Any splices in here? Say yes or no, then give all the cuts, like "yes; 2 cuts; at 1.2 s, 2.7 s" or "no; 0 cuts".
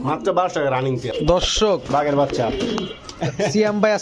yes; 1 cut; at 1.1 s